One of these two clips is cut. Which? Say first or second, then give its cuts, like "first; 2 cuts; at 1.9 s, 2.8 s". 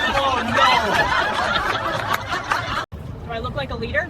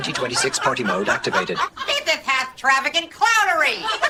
first; 1 cut; at 3.0 s